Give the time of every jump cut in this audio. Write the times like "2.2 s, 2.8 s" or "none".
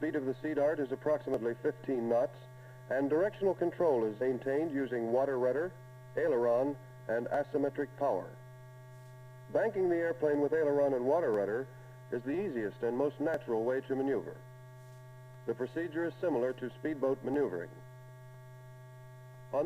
13.2 s